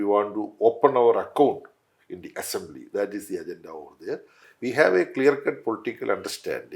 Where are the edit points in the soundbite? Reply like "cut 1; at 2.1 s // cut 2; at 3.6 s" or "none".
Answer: cut 1; at 4.4 s